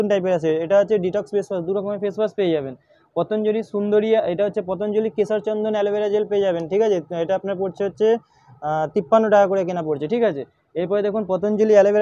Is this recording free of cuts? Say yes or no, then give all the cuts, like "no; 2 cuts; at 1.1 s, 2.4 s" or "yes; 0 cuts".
yes; 0 cuts